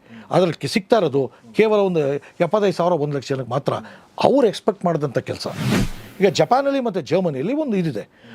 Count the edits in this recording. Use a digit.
1